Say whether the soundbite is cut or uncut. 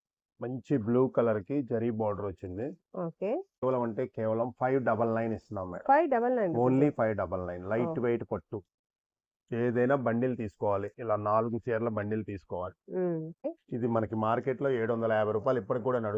cut